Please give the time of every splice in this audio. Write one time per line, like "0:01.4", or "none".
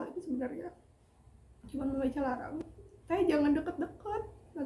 none